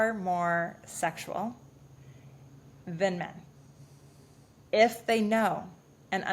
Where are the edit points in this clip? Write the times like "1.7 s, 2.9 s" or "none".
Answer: none